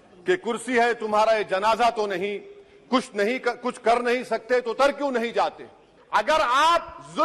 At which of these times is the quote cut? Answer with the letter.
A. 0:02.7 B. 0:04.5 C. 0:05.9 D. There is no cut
C